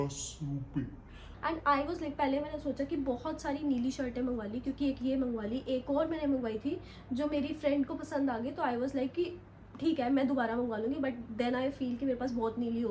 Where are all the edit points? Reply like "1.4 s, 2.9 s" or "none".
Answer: none